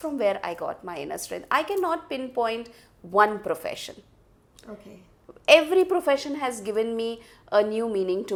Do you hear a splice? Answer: no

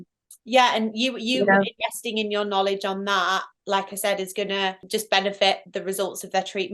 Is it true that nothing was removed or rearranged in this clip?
no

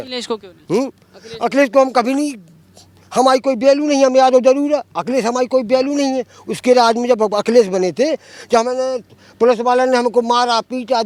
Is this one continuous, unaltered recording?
yes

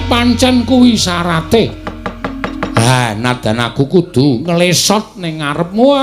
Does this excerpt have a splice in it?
no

